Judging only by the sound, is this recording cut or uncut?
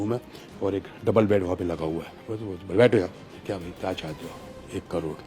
cut